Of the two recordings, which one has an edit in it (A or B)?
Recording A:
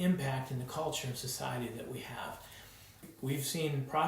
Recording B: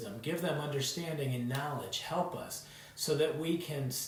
A